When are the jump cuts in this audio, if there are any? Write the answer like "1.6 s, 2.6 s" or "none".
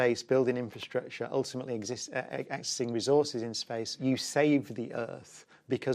4.0 s